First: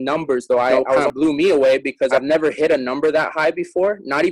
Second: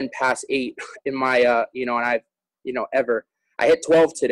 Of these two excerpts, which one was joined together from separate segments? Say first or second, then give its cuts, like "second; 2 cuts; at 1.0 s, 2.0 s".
first; 2 cuts; at 1.1 s, 2.1 s